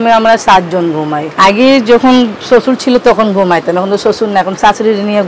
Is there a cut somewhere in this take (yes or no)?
no